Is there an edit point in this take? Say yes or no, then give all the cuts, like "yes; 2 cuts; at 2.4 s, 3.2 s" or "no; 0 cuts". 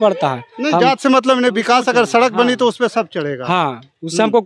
no; 0 cuts